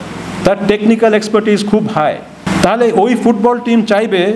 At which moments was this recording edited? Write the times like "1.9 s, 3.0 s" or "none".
2.4 s